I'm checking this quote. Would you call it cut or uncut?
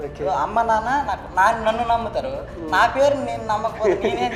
uncut